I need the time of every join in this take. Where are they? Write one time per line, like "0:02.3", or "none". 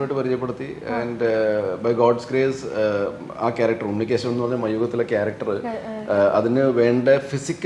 none